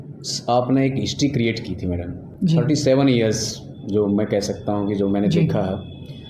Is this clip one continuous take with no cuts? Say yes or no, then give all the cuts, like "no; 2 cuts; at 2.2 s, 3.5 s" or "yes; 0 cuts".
yes; 0 cuts